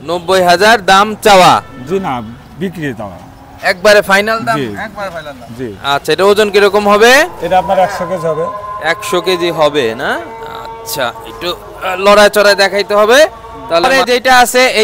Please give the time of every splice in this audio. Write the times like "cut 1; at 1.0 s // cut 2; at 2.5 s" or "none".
none